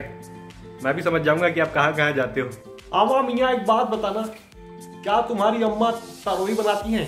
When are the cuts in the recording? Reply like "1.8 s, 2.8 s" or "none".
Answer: 2.6 s